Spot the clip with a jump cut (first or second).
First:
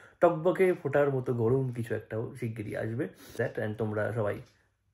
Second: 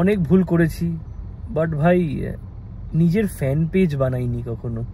first